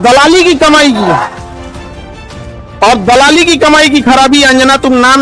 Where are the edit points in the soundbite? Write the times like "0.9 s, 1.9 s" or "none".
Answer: 1.3 s, 2.8 s